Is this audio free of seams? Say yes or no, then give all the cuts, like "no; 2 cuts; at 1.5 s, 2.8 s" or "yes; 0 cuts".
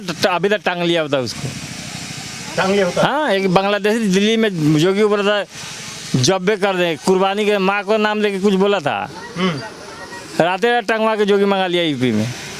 yes; 0 cuts